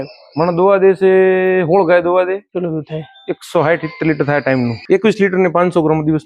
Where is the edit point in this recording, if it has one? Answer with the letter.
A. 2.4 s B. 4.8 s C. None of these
B